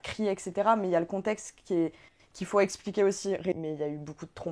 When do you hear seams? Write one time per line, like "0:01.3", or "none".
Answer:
0:03.5